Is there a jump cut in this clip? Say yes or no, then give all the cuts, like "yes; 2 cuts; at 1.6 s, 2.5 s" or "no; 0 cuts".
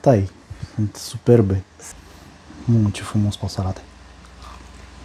yes; 1 cut; at 1.7 s